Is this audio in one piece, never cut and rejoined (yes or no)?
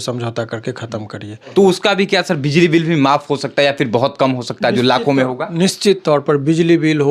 no